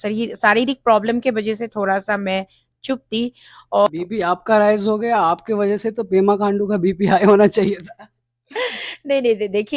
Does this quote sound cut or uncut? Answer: cut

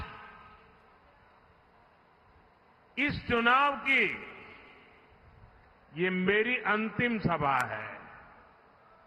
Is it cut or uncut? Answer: uncut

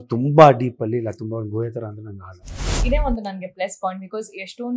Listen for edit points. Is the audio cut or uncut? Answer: cut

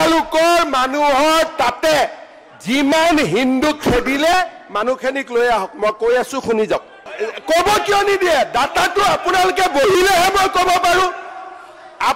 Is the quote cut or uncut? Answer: cut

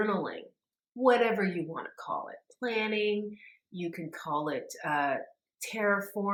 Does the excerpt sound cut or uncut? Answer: uncut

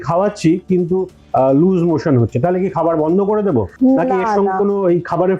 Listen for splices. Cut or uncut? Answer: uncut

